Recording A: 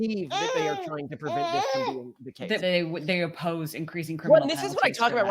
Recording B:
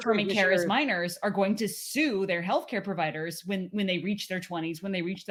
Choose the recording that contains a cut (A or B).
A